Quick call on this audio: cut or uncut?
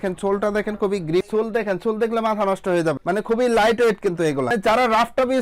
cut